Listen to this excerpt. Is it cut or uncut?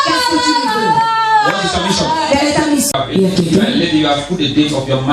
cut